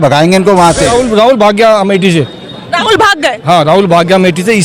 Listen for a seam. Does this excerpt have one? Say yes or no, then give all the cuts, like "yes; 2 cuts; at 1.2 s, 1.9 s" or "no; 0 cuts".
yes; 1 cut; at 0.9 s